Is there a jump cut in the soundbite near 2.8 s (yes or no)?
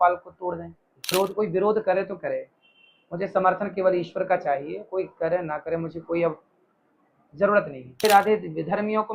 no